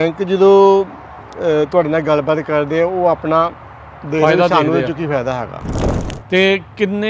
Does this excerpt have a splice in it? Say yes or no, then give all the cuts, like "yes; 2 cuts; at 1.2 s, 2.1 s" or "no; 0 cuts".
yes; 1 cut; at 5.6 s